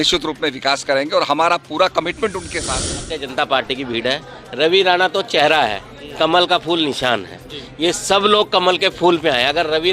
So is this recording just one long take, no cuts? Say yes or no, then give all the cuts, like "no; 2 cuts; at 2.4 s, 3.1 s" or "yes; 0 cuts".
no; 1 cut; at 3.2 s